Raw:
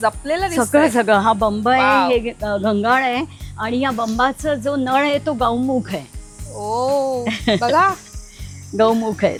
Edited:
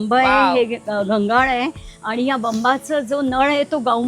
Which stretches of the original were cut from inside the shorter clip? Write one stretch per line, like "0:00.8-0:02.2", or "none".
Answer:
none